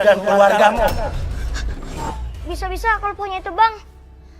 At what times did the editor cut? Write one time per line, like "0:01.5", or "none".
0:02.1